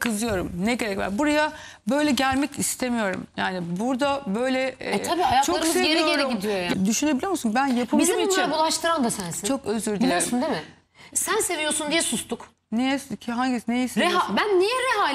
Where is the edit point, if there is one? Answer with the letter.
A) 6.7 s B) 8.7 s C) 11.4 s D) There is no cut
A